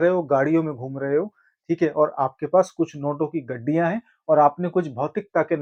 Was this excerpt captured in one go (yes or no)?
yes